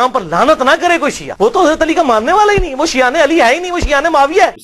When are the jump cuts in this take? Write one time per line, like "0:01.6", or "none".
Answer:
none